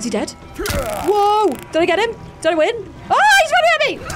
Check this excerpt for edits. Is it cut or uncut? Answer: cut